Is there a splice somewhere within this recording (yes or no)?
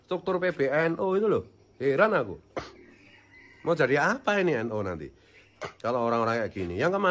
no